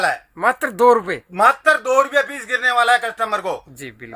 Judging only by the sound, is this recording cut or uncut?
uncut